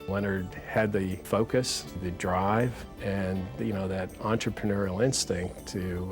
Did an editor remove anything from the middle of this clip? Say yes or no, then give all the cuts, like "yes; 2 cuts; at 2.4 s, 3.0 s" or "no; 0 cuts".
yes; 3 cuts; at 1.2 s, 2.0 s, 2.9 s